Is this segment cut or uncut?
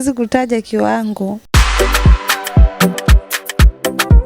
cut